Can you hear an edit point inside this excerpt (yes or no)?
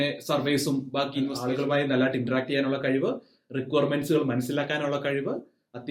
yes